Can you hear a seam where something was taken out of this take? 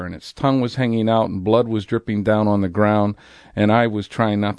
no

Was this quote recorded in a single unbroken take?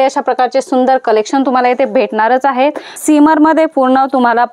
no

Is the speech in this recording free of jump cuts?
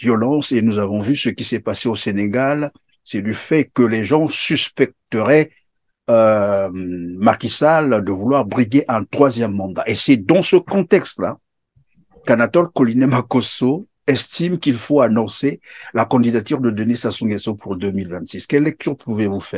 yes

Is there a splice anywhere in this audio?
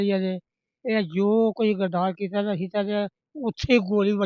no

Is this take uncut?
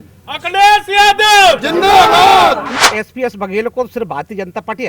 no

